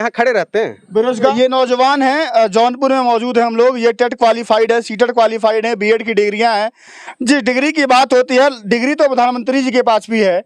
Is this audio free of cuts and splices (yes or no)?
no